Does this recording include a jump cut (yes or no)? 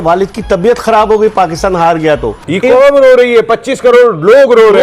yes